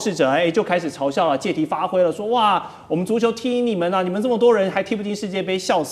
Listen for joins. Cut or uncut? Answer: uncut